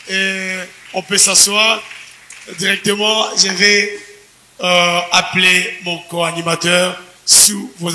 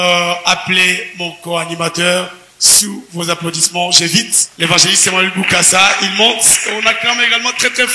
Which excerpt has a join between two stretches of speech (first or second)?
second